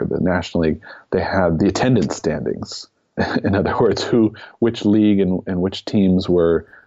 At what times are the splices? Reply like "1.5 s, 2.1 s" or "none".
1.6 s, 3.1 s